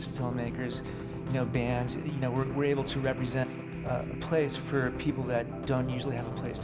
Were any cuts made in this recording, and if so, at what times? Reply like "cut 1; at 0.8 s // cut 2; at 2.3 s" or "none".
cut 1; at 5.6 s